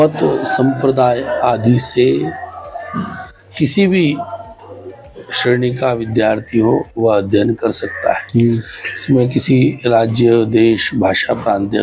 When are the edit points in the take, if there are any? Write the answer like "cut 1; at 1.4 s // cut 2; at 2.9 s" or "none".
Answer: none